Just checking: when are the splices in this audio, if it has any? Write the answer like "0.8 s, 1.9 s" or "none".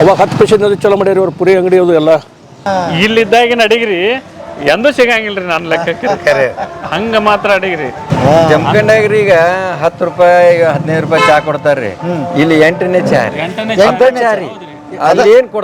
2.6 s, 8.1 s

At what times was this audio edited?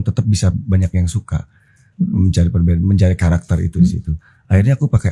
none

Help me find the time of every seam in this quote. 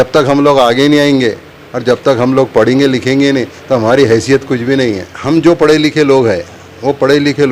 5.1 s

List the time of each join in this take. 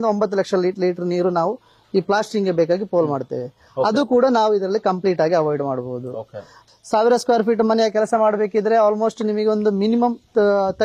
6.6 s

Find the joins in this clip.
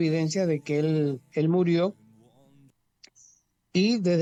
none

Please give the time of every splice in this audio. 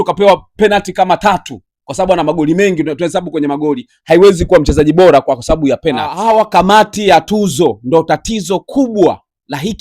6.1 s

